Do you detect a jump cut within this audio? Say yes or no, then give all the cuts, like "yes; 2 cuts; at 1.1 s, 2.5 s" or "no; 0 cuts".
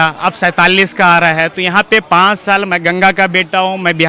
no; 0 cuts